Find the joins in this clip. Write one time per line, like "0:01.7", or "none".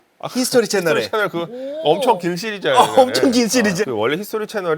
0:03.8